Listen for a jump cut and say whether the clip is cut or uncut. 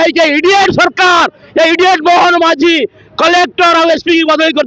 uncut